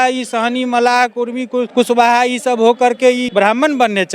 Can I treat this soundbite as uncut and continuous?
no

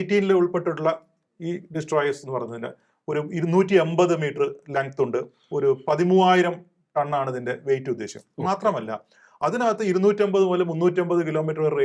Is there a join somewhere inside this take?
no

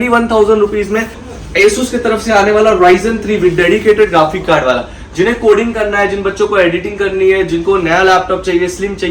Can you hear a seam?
yes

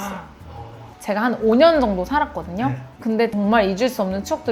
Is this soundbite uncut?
no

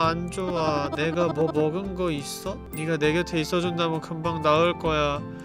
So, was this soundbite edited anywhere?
yes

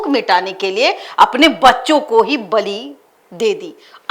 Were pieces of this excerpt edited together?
no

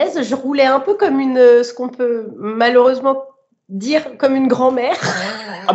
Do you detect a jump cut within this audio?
no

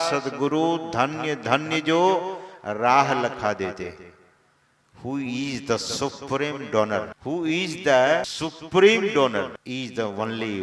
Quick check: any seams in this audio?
yes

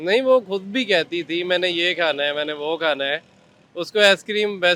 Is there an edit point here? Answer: no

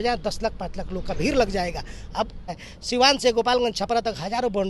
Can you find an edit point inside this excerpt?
yes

